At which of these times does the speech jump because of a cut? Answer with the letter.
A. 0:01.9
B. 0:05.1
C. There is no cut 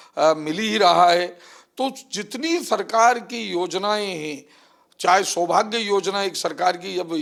C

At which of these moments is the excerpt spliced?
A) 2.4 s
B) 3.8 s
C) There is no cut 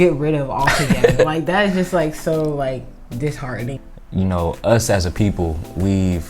B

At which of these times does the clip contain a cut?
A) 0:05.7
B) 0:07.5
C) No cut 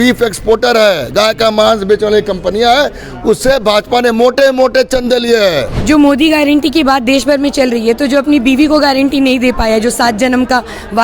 A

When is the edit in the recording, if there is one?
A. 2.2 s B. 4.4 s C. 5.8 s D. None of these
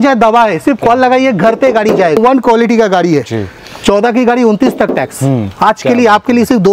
A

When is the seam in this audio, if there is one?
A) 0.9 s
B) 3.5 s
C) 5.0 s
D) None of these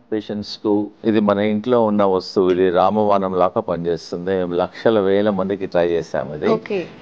A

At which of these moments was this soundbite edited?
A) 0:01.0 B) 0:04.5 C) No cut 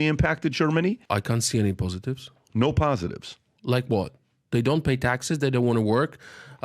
A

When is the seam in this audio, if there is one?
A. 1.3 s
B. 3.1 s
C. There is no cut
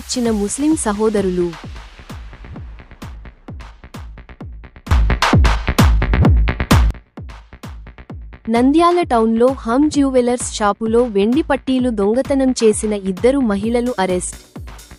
C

